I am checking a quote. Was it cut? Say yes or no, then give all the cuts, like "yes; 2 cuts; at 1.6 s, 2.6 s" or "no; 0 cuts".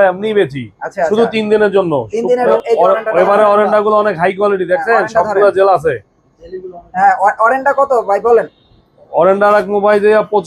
yes; 1 cut; at 2.5 s